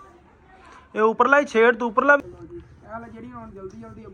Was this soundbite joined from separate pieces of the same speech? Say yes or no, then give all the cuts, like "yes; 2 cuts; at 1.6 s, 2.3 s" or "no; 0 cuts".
yes; 1 cut; at 2.2 s